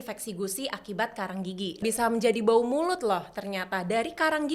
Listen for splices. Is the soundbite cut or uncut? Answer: cut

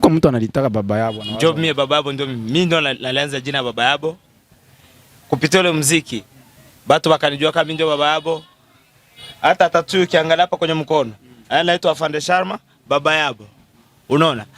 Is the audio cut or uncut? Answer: cut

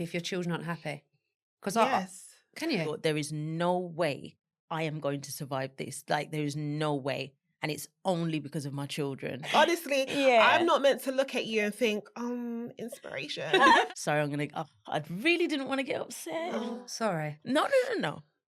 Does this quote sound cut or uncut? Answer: cut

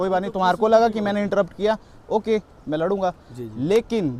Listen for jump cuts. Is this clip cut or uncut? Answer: uncut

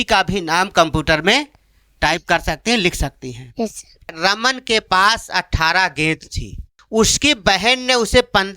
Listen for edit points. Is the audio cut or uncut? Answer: cut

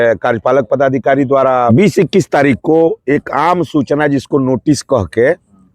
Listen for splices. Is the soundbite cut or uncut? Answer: cut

